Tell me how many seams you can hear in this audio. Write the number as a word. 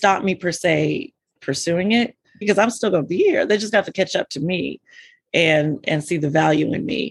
one